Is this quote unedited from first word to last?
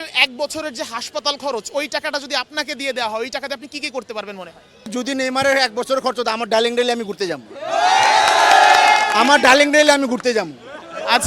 no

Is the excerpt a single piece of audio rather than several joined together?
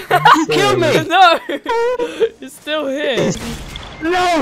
no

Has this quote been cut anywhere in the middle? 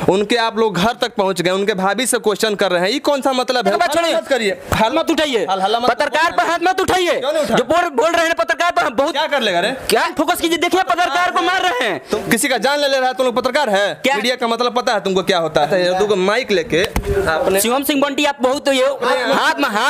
yes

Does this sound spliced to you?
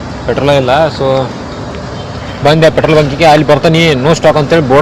no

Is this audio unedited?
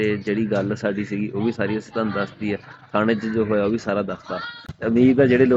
yes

